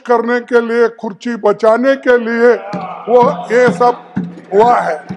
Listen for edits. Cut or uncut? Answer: uncut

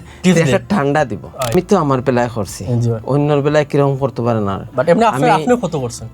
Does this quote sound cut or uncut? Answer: cut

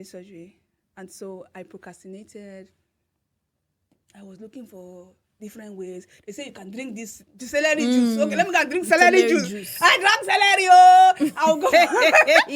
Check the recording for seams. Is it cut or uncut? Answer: uncut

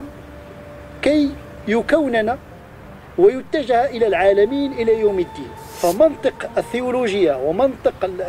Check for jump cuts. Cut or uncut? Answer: cut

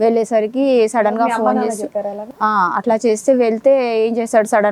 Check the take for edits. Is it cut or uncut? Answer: uncut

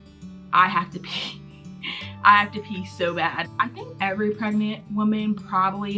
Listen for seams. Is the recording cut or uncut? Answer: cut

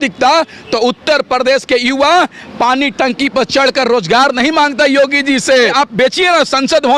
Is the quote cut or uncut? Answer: cut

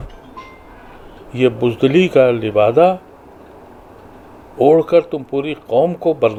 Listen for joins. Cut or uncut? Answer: uncut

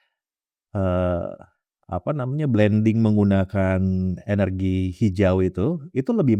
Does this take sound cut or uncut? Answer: uncut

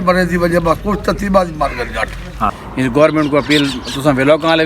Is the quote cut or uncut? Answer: cut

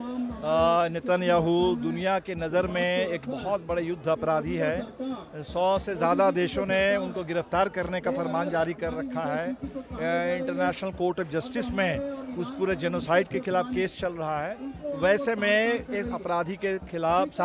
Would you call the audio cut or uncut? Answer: uncut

